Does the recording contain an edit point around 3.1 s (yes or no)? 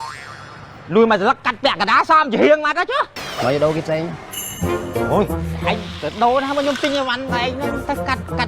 yes